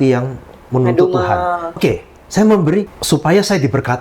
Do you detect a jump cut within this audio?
yes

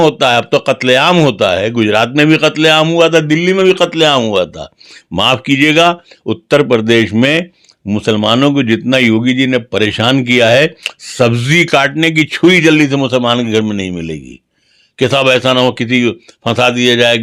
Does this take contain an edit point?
no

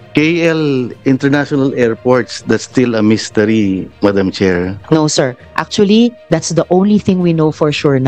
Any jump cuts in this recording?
no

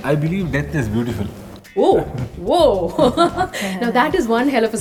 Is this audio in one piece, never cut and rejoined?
yes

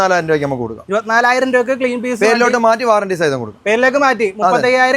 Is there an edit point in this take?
no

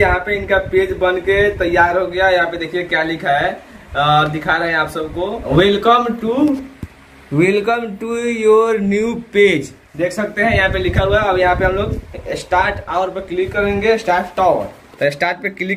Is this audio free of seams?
yes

